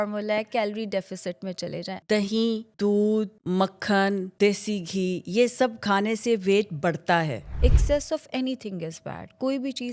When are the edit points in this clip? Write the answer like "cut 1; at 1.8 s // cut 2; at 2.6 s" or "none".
cut 1; at 1.9 s // cut 2; at 2.7 s // cut 3; at 3.4 s // cut 4; at 4.3 s

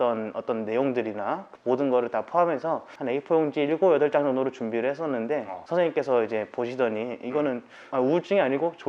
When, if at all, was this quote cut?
cut 1; at 1.5 s // cut 2; at 2.9 s // cut 3; at 5.5 s

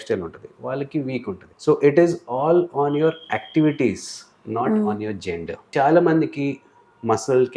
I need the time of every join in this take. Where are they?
cut 1; at 1.5 s // cut 2; at 5.7 s

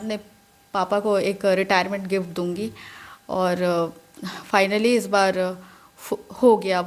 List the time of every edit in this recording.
none

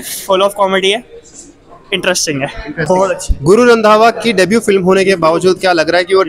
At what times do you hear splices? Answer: none

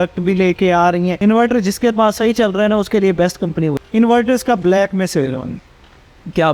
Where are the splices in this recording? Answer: cut 1; at 1.2 s // cut 2; at 3.8 s

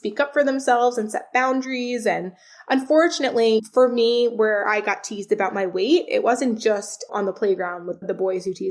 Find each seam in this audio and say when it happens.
none

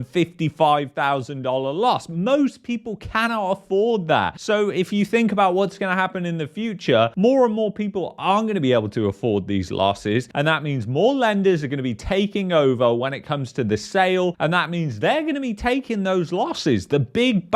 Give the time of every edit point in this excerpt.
none

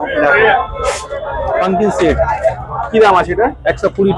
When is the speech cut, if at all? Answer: cut 1; at 1.4 s

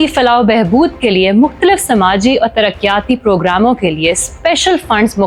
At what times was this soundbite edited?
none

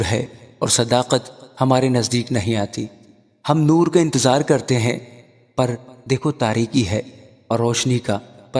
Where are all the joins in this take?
none

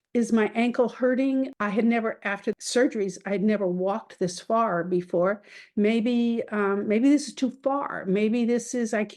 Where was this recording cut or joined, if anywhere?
cut 1; at 1.5 s // cut 2; at 2.6 s

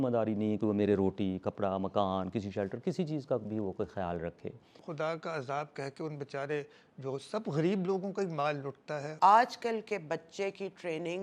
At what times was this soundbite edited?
cut 1; at 4.8 s // cut 2; at 9.1 s

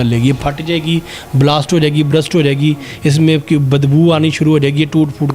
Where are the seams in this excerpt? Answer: none

